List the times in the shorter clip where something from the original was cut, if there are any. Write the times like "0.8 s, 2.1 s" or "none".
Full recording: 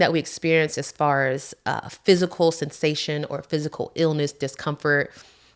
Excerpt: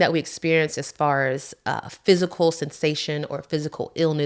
none